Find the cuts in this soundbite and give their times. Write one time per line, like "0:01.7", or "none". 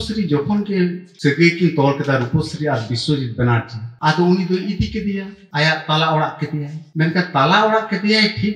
none